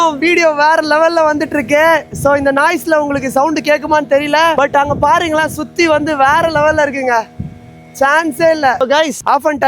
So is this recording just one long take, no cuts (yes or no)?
yes